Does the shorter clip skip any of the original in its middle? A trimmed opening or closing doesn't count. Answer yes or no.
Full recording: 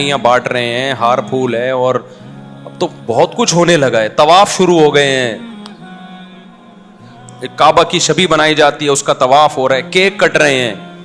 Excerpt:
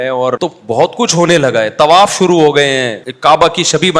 yes